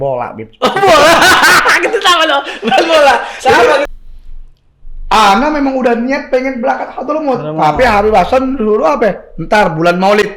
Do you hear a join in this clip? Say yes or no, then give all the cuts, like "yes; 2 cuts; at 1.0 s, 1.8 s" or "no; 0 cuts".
yes; 1 cut; at 3.9 s